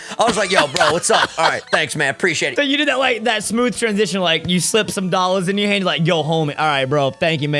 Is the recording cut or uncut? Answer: cut